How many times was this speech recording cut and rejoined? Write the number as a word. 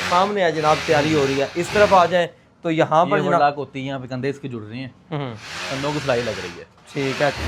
zero